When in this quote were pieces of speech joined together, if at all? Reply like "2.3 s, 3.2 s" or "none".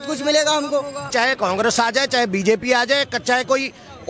1.0 s